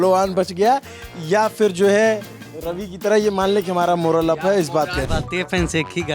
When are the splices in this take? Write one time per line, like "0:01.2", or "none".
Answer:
0:05.0